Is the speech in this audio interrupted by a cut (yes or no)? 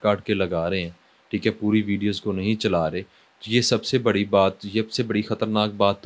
no